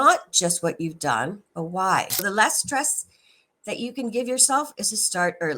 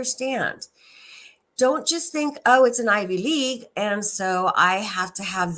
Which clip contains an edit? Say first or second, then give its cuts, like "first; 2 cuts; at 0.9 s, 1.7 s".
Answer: first; 1 cut; at 2.2 s